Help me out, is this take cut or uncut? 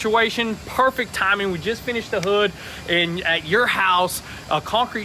uncut